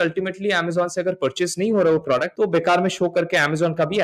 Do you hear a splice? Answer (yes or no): yes